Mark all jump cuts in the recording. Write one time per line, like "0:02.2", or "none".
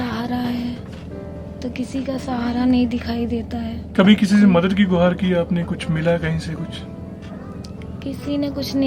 none